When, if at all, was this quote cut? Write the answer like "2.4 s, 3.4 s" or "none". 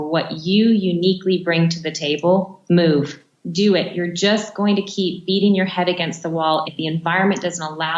2.6 s, 3.3 s, 6.6 s